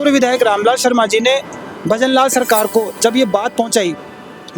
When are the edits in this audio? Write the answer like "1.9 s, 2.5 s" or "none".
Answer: none